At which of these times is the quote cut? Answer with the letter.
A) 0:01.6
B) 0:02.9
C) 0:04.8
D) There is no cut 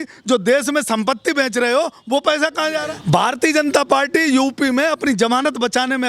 B